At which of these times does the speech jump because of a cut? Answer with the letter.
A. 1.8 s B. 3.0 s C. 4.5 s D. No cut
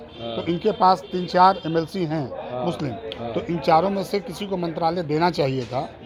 D